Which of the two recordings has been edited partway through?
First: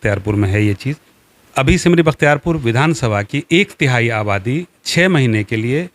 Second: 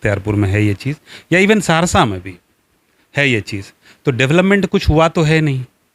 first; 1 cut; at 1.1 s

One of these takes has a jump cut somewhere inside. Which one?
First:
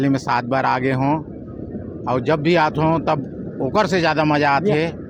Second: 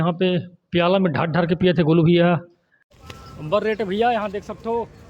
second; 1 cut; at 3.1 s

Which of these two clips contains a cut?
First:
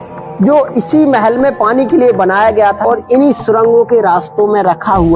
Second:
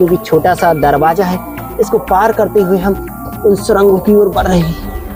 first; 1 cut; at 2.8 s

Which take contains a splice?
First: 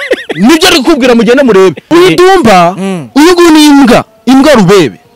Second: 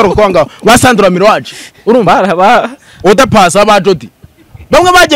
first; 1 cut; at 1.8 s

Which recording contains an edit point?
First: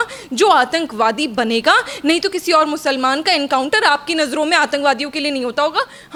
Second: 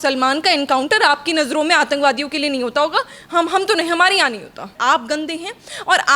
second; 1 cut; at 4.7 s

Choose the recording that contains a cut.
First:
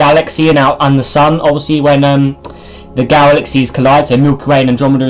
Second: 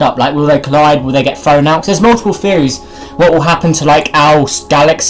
second; 1 cut; at 1.4 s

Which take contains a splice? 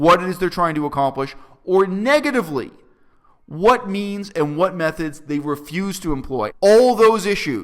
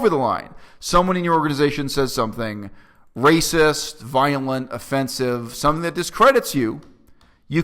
first; 1 cut; at 6.5 s

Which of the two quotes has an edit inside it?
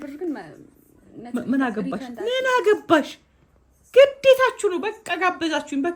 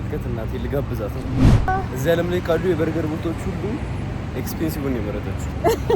second; 1 cut; at 1.7 s

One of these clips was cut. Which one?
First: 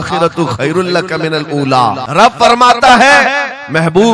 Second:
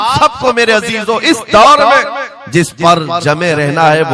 first; 1 cut; at 2.0 s

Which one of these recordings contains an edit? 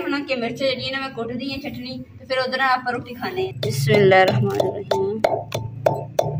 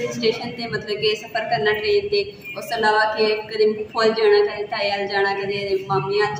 first; 1 cut; at 3.5 s

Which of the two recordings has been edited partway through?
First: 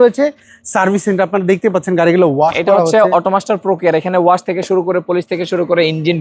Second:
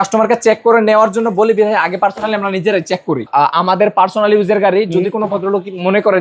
second; 1 cut; at 3.3 s

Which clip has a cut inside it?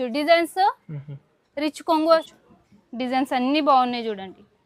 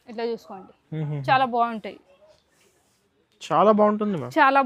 first; 1 cut; at 2.3 s

